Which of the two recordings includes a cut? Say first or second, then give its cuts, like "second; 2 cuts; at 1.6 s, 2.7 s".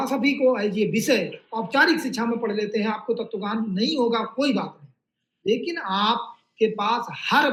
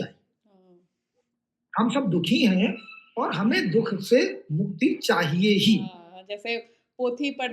second; 1 cut; at 6.1 s